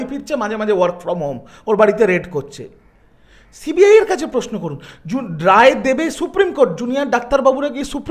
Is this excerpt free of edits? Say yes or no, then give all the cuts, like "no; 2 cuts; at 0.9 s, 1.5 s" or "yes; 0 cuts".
yes; 0 cuts